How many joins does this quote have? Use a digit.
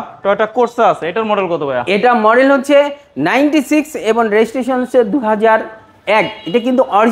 0